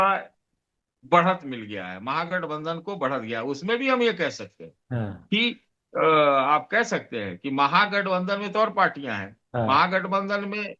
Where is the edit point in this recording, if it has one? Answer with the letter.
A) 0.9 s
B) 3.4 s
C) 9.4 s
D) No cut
D